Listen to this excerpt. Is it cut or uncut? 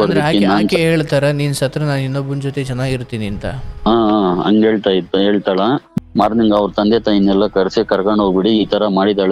cut